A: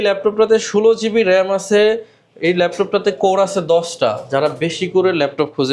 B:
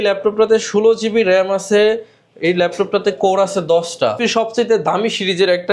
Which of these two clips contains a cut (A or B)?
B